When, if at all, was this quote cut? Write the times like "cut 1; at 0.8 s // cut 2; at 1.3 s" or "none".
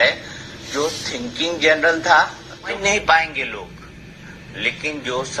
cut 1; at 2.8 s